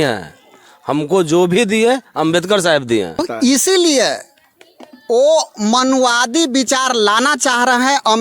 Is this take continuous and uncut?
no; 1 cut; at 3.2 s

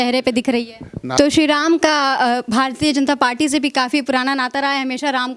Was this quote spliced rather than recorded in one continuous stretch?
yes; 1 cut; at 1.0 s

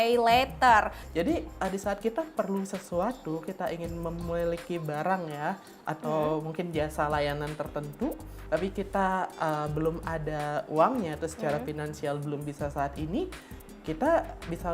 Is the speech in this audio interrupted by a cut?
yes; 1 cut; at 1.0 s

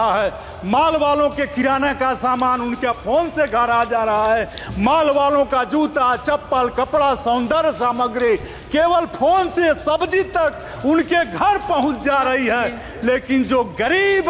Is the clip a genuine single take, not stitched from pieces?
yes; 0 cuts

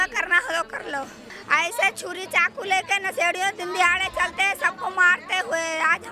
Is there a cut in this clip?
yes; 1 cut; at 1.4 s

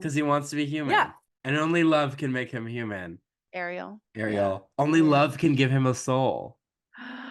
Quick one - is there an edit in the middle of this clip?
yes; 1 cut; at 1.3 s

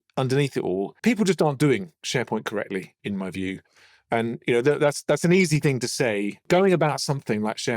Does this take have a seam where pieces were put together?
yes; 3 cuts; at 1.0 s, 2.9 s, 6.4 s

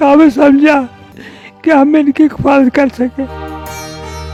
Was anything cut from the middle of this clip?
no; 0 cuts

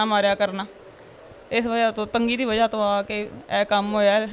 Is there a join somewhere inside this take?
no; 0 cuts

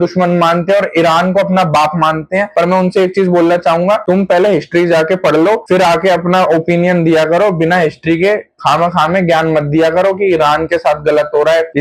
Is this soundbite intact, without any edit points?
yes; 0 cuts

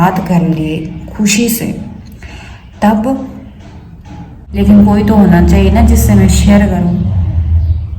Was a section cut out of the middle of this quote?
yes; 1 cut; at 4.4 s

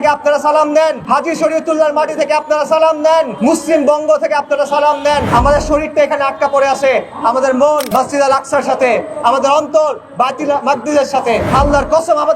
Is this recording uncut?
no; 5 cuts; at 1.0 s, 3.3 s, 5.3 s, 7.9 s, 11.5 s

